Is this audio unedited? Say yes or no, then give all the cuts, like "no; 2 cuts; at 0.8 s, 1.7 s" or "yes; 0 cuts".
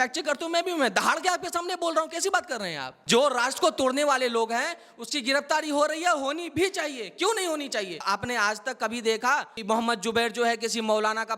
no; 3 cuts; at 2.9 s, 8.0 s, 9.6 s